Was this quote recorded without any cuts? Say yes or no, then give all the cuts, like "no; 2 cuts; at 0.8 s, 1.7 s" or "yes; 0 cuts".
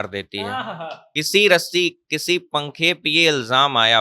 no; 1 cut; at 1.0 s